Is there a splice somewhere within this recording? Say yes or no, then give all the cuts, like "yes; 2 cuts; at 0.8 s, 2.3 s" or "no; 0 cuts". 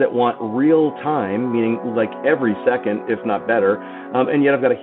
no; 0 cuts